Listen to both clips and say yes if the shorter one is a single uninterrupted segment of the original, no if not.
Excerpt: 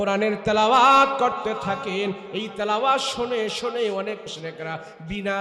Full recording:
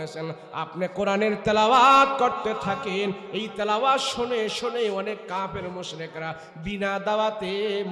no